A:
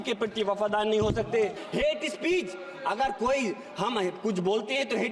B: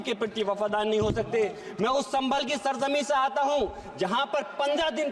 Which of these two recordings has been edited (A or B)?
A